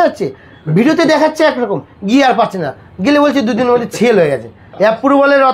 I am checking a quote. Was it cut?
yes; 1 cut; at 4.6 s

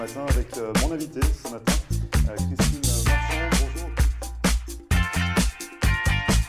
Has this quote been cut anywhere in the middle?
no; 0 cuts

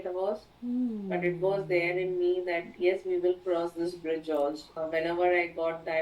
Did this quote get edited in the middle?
yes; 1 cut; at 4.7 s

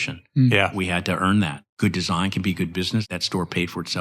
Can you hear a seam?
yes; 2 cuts; at 1.6 s, 3.1 s

